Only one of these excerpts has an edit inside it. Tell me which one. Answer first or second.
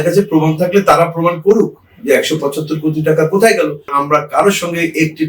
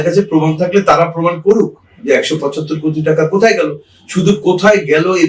first